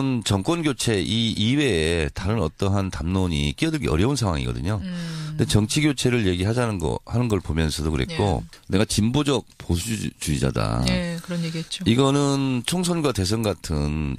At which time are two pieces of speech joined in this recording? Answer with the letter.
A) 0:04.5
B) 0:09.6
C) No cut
A